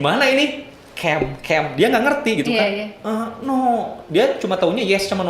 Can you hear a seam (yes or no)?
no